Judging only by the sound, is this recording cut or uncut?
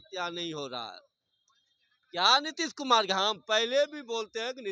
uncut